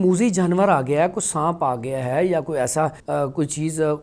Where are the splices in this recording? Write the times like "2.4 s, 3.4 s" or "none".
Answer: 3.0 s